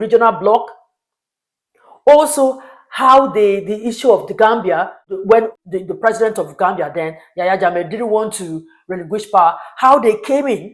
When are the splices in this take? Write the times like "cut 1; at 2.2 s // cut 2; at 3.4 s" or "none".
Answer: cut 1; at 5.1 s